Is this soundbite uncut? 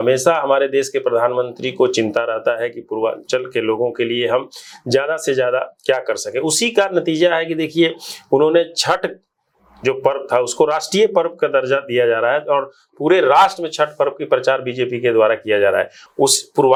yes; 0 cuts

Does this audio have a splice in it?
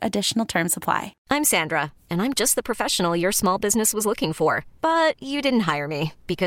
yes; 1 cut; at 1.1 s

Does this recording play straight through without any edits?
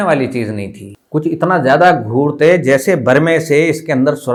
yes; 0 cuts

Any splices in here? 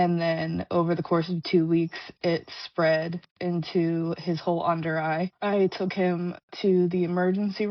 no; 0 cuts

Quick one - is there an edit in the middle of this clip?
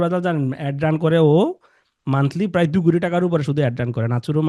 no; 0 cuts

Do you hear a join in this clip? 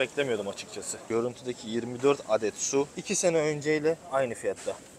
yes; 2 cuts; at 1.0 s, 3.0 s

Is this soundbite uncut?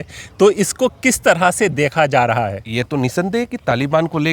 no; 1 cut; at 2.6 s

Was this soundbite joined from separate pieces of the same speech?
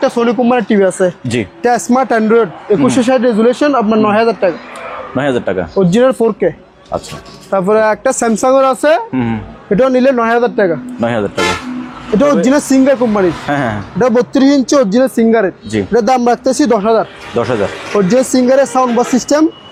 no; 0 cuts

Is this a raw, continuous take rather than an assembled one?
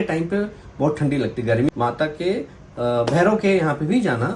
no; 1 cut; at 1.7 s

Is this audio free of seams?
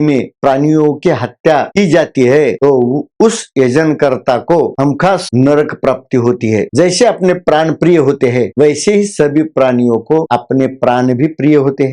no; 1 cut; at 6.7 s

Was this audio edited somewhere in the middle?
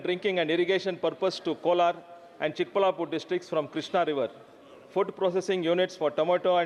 no; 0 cuts

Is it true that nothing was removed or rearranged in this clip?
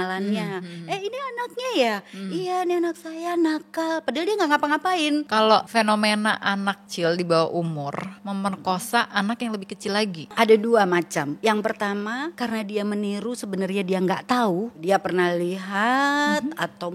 no; 7 cuts; at 5.5 s, 6.9 s, 8.1 s, 10.3 s, 11.3 s, 12.3 s, 14.8 s

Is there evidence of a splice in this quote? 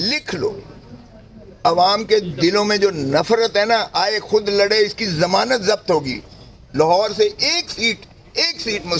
no; 0 cuts

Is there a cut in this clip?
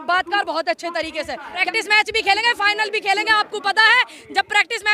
yes; 1 cut; at 1.7 s

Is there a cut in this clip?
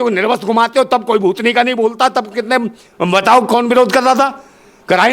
no; 0 cuts

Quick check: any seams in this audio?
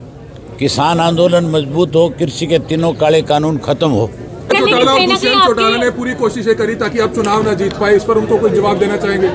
yes; 1 cut; at 4.5 s

